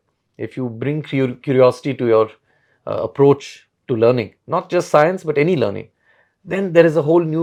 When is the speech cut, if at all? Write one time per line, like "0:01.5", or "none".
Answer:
none